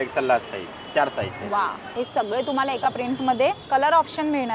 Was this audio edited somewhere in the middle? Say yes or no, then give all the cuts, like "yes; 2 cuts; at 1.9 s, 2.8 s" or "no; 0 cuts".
yes; 2 cuts; at 1.8 s, 3.6 s